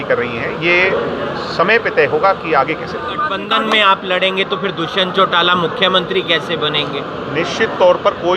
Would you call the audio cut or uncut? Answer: cut